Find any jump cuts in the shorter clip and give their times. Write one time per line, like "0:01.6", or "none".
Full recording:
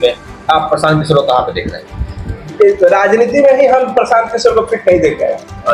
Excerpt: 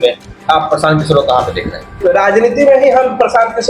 0:02.0